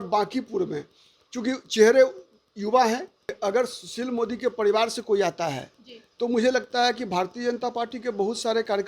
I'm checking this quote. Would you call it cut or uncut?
cut